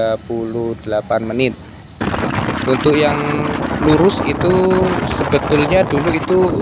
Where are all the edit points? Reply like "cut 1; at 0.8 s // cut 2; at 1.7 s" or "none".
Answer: cut 1; at 2.0 s